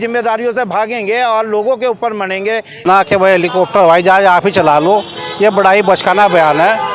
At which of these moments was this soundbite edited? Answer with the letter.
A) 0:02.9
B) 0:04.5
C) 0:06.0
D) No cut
A